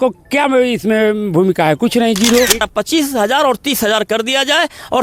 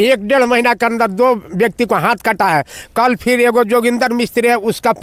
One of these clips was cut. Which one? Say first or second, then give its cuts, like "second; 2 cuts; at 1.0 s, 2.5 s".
first; 1 cut; at 2.7 s